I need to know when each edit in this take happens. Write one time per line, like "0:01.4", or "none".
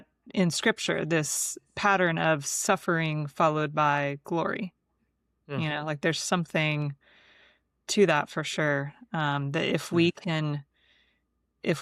none